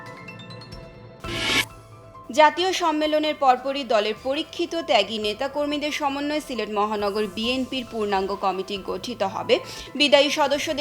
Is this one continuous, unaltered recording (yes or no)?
no